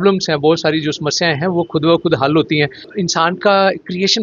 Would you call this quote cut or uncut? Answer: cut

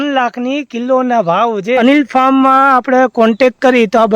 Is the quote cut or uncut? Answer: cut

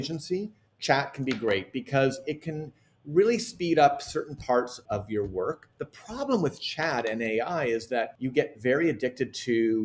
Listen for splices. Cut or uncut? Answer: cut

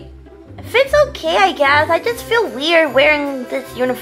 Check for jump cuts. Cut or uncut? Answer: uncut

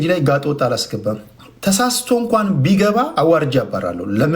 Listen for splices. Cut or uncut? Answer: cut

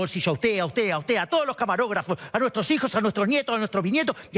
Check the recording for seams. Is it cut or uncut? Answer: uncut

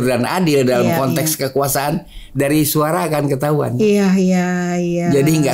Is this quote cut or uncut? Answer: uncut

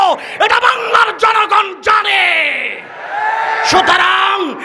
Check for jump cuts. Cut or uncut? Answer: uncut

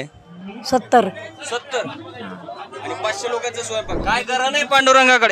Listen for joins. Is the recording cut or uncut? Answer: cut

